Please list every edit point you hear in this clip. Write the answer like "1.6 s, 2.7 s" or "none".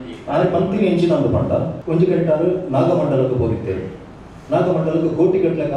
1.8 s